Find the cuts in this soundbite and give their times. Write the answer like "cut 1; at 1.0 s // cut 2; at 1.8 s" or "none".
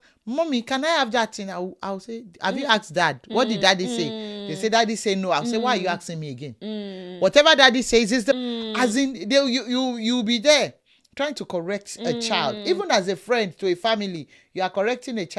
cut 1; at 8.3 s